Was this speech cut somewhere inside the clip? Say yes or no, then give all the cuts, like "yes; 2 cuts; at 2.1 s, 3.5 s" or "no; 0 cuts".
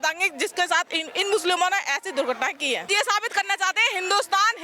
yes; 1 cut; at 2.9 s